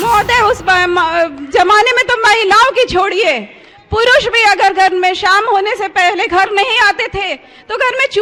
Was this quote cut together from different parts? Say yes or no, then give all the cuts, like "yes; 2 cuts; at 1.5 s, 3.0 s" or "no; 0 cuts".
no; 0 cuts